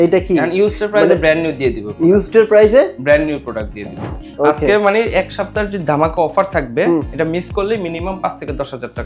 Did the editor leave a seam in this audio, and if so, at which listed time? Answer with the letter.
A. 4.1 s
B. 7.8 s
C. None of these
A